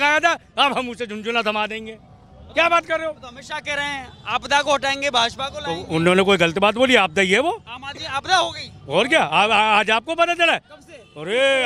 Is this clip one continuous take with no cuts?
yes; 0 cuts

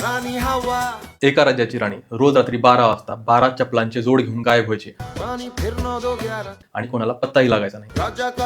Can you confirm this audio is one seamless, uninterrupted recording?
no; 1 cut; at 1.1 s

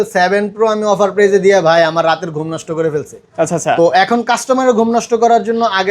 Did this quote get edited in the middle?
no; 0 cuts

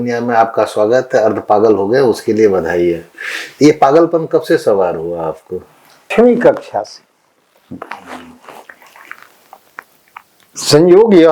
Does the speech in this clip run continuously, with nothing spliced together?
no; 1 cut; at 6.1 s

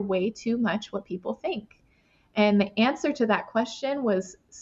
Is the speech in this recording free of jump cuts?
yes; 0 cuts

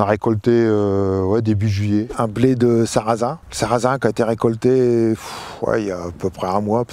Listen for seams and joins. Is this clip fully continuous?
no; 2 cuts; at 2.1 s, 3.4 s

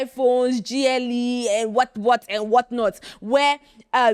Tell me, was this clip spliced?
no; 0 cuts

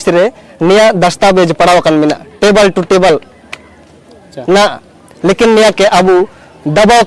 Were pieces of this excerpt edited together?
no; 0 cuts

